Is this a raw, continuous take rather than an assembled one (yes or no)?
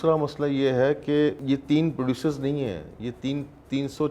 no